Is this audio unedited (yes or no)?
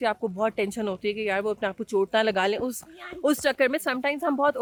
yes